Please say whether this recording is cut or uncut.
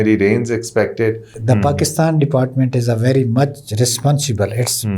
cut